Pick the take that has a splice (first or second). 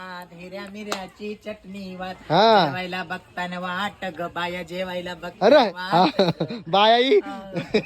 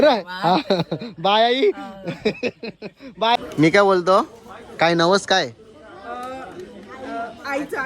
second